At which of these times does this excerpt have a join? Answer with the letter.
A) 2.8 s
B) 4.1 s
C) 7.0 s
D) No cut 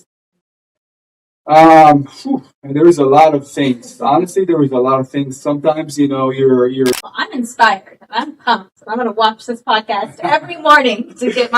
C